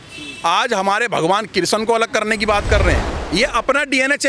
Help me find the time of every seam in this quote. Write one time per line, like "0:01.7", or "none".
0:03.1